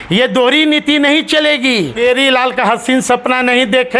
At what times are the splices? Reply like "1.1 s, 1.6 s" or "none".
2.0 s